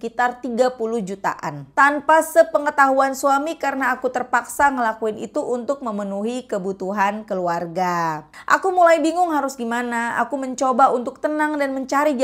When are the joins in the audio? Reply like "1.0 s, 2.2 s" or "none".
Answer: 1.5 s, 8.3 s